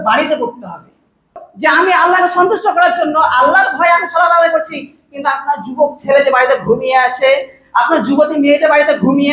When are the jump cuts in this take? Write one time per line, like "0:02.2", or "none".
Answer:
0:01.4